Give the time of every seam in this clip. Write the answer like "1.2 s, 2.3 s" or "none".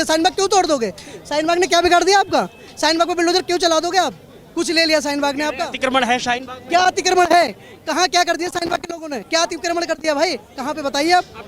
none